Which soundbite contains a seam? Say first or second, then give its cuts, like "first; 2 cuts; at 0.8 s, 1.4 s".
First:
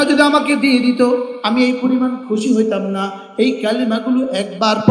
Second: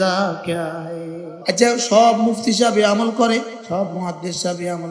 second; 2 cuts; at 1.3 s, 3.6 s